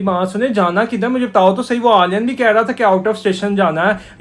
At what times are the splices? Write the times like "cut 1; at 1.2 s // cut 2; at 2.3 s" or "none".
none